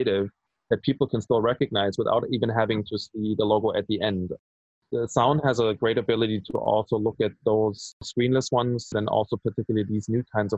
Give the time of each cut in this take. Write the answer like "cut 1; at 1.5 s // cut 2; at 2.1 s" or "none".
cut 1; at 8.0 s // cut 2; at 8.9 s